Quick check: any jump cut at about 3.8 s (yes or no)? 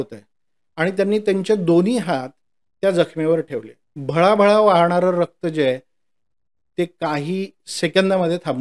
no